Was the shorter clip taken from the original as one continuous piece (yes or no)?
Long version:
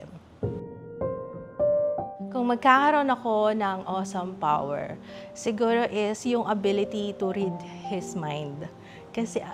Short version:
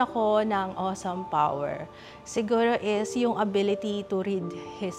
yes